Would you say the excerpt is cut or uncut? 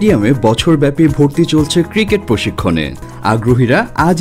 cut